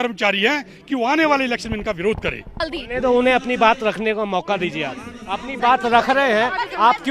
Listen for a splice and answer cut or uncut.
cut